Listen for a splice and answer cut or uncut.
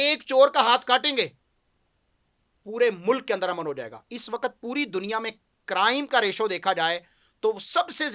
uncut